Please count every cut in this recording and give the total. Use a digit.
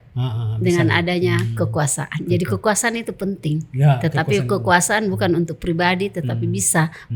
0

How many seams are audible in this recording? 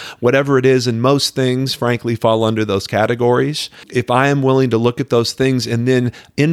1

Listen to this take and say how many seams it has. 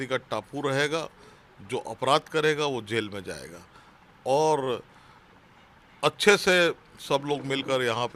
0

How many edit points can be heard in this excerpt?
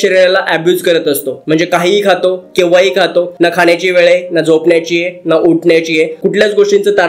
0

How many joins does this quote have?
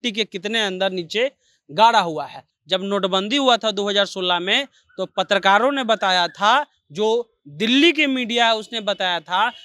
1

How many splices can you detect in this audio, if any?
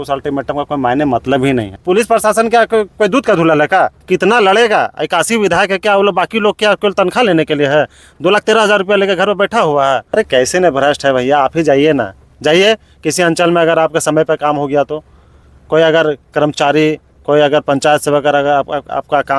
3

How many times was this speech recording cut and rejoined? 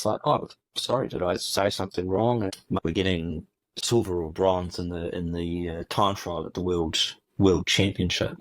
2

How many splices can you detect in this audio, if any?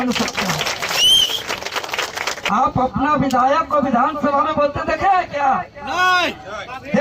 1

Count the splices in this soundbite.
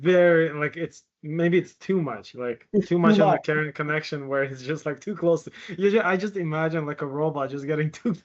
0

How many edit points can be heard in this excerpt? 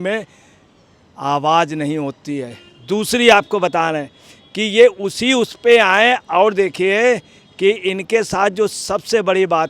0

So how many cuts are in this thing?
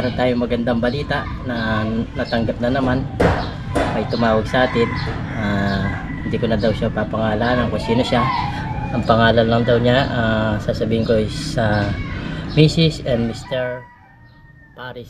0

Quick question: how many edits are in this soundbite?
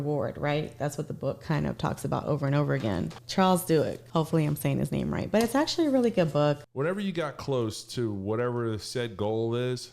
3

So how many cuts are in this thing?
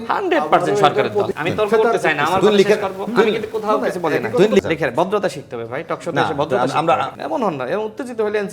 3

